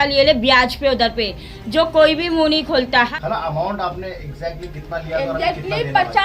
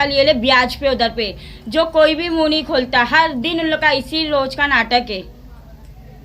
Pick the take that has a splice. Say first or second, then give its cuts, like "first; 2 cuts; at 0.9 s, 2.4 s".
first; 1 cut; at 3.1 s